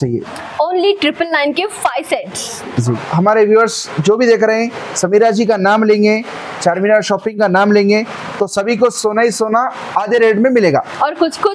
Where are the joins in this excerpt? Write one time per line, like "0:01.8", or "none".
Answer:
0:03.0